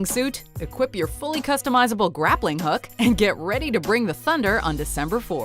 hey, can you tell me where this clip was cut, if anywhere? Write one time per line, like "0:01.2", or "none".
none